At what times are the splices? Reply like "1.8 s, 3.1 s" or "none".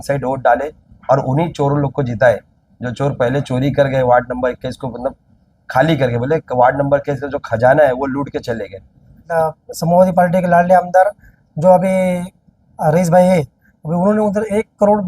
9.2 s